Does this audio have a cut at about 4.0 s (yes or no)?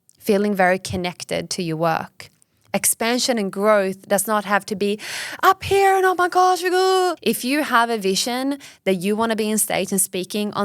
no